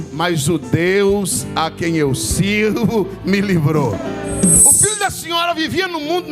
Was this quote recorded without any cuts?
no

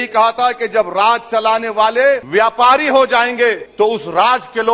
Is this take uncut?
no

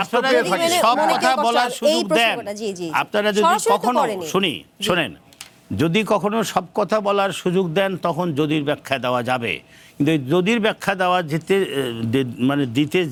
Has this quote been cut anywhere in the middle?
no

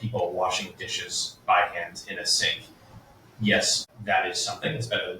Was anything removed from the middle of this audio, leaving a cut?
yes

